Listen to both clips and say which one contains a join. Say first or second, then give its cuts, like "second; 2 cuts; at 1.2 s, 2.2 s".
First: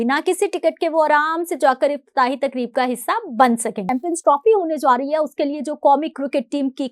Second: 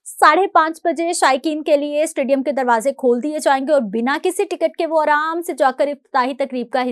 first; 1 cut; at 4.0 s